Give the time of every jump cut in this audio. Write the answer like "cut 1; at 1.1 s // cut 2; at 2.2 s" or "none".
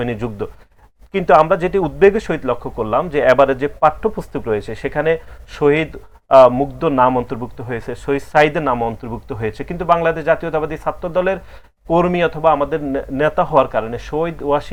none